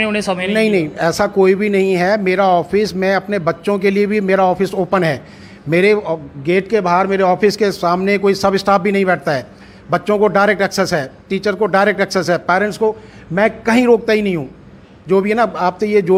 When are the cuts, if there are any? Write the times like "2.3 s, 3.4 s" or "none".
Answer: none